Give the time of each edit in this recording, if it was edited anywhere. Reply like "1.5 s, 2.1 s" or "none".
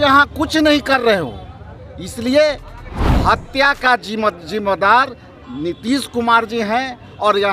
3.0 s